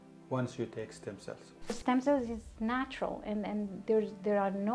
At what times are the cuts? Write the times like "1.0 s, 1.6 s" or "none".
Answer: 1.8 s